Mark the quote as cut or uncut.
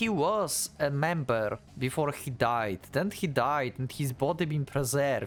uncut